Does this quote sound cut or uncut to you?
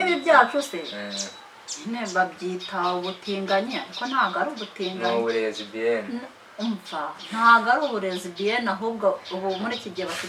uncut